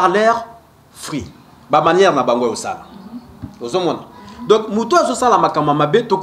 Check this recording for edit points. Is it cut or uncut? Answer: uncut